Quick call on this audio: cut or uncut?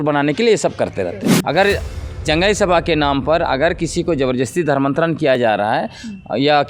cut